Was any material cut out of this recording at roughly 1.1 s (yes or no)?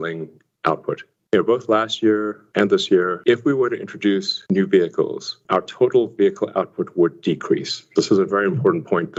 no